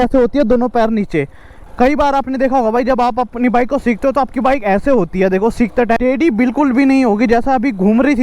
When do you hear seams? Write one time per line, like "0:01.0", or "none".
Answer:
0:01.6
0:06.0